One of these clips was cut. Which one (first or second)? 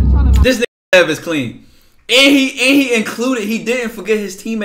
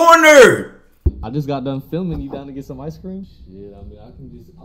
second